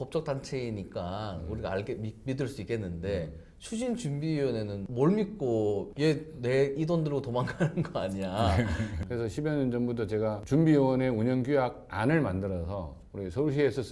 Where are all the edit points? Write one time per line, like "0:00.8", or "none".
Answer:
0:05.9
0:08.9